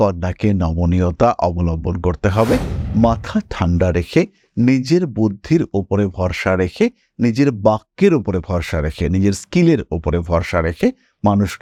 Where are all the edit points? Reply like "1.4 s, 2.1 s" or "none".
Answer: none